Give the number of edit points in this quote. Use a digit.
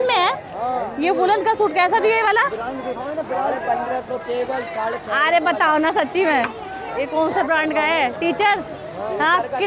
0